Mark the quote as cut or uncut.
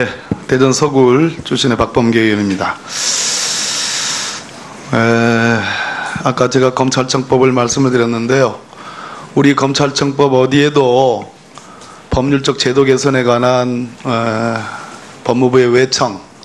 cut